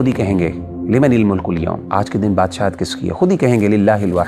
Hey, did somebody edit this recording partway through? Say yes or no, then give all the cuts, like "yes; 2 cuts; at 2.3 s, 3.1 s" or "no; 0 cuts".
yes; 1 cut; at 1.8 s